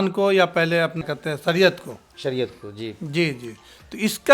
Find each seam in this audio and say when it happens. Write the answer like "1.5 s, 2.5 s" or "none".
1.0 s